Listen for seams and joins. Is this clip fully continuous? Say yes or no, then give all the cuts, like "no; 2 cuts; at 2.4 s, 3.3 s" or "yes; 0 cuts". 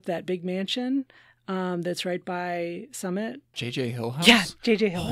no; 1 cut; at 3.5 s